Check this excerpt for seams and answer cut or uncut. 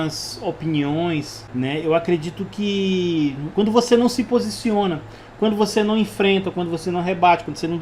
uncut